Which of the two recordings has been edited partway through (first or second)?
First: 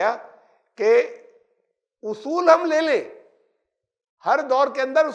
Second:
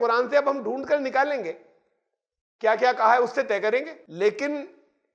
second